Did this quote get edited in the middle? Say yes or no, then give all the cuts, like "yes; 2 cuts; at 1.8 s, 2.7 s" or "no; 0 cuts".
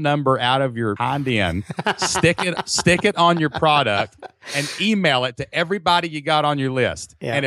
yes; 1 cut; at 1.0 s